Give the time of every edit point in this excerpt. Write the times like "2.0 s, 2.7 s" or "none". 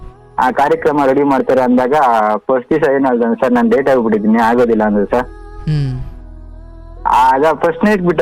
none